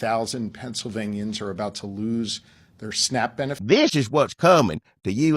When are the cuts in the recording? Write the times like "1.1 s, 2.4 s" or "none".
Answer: 3.6 s